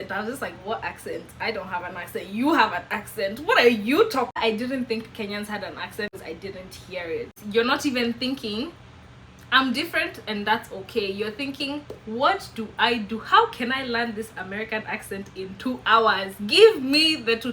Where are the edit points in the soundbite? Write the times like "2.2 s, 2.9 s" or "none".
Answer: 4.4 s, 6.1 s, 7.4 s